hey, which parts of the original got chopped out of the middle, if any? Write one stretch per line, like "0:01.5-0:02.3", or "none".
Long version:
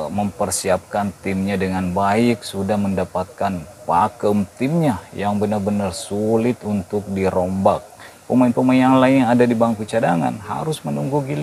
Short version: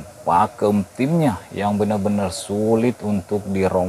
none